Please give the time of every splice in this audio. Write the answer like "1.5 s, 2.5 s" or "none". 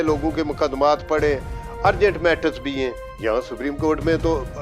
none